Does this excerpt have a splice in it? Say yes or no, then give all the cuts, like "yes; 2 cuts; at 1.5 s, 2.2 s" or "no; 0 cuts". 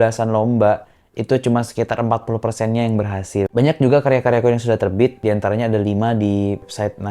yes; 1 cut; at 3.5 s